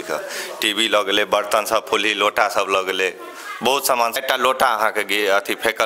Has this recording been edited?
yes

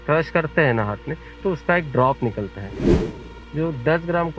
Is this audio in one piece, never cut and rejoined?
no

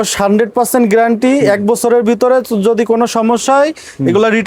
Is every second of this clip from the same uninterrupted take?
yes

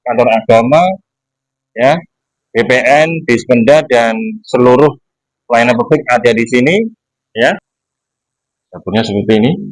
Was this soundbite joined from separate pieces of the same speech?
yes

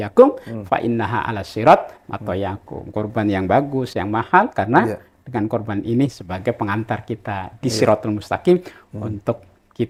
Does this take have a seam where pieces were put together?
no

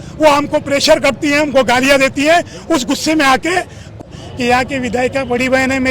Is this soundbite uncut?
no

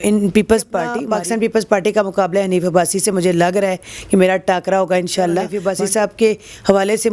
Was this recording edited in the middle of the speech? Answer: yes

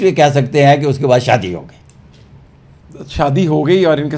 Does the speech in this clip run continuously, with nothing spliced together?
yes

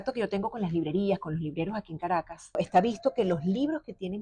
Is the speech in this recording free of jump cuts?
no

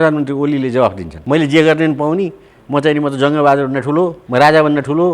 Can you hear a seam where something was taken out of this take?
yes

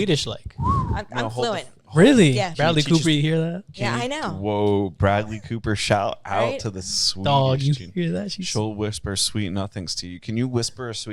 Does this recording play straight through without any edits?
no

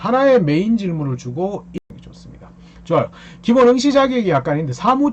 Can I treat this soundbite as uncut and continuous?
no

